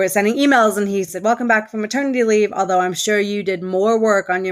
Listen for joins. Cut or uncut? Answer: cut